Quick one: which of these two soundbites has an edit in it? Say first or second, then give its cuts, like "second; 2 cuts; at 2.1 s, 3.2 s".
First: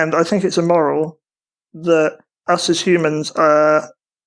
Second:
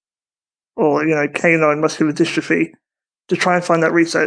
first; 1 cut; at 2.3 s